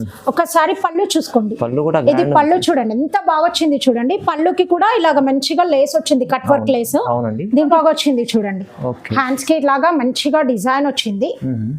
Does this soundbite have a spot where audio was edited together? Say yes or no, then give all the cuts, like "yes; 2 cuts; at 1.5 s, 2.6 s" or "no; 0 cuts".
yes; 1 cut; at 7.7 s